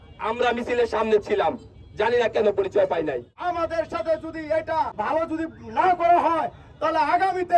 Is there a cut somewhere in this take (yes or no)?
yes